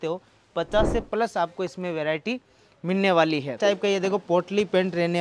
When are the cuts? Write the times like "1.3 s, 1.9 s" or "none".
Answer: 3.6 s